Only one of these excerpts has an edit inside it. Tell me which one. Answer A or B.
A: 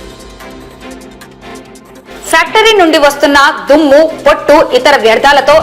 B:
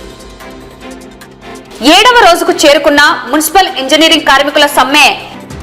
B